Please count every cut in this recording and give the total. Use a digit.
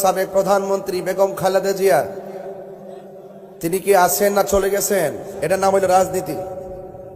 1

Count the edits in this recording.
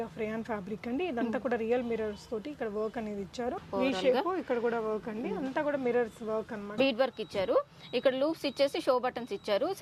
2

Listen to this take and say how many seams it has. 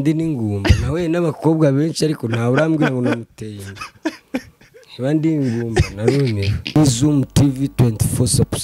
1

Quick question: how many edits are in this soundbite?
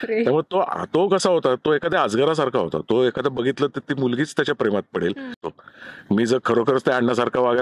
1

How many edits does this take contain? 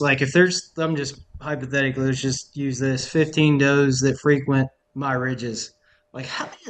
1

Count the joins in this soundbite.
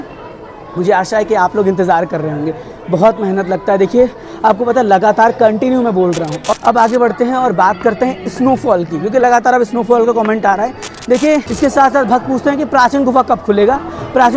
2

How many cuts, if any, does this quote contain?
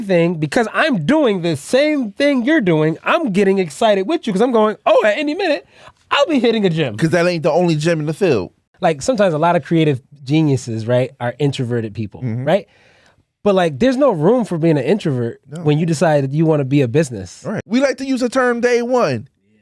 2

